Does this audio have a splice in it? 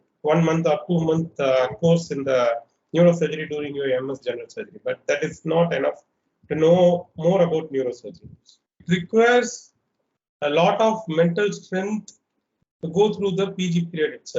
yes; 1 cut; at 8.7 s

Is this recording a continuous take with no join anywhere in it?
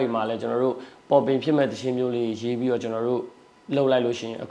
yes; 0 cuts

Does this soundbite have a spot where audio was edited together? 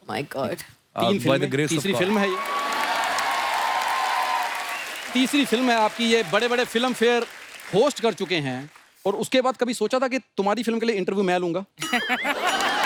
no; 0 cuts

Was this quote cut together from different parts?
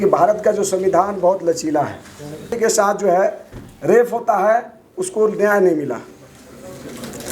yes; 1 cut; at 2.5 s

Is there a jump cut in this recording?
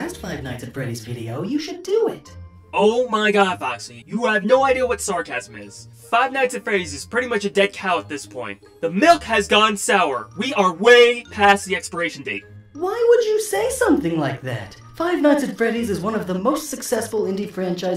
yes; 1 cut; at 8.1 s

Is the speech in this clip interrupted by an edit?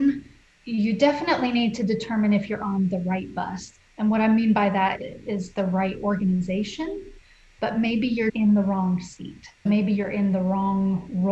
yes; 3 cuts; at 5.0 s, 8.3 s, 9.6 s

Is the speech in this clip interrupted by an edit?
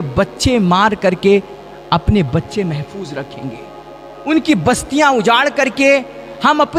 no; 0 cuts

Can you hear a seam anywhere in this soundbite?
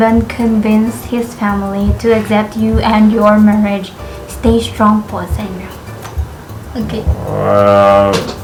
no; 0 cuts

